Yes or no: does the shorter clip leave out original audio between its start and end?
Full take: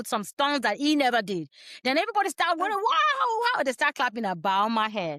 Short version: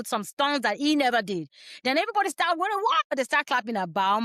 yes